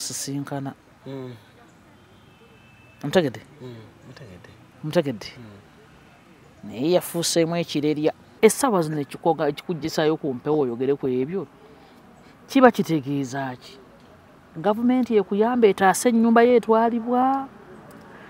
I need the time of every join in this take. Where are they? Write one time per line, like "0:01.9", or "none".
0:08.3